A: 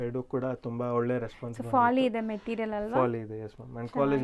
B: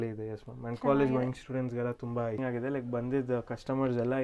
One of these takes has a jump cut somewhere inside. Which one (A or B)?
B